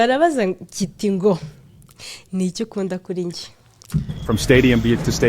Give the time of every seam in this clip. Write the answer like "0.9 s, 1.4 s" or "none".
4.1 s